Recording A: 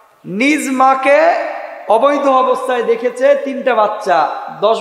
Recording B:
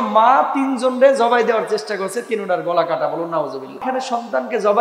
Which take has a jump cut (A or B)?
B